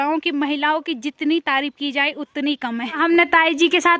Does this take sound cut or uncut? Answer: cut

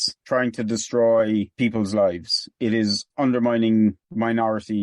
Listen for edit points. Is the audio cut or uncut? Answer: uncut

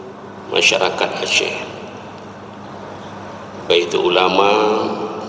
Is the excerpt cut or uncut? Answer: uncut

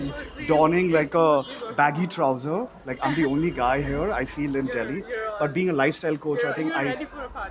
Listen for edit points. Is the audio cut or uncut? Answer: uncut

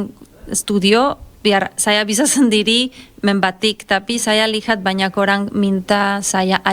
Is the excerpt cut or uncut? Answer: uncut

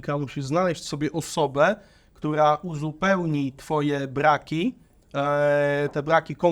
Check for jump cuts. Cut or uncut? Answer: uncut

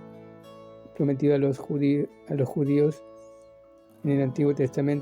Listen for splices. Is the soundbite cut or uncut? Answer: cut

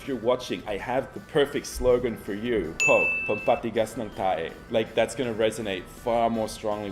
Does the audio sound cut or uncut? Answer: cut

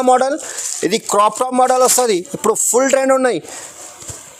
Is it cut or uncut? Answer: uncut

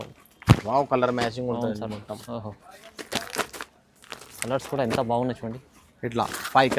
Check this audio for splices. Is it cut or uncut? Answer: uncut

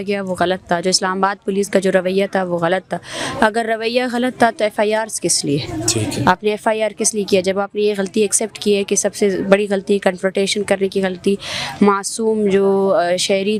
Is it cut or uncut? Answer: uncut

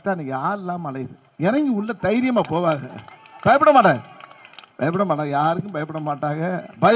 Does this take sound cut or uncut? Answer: uncut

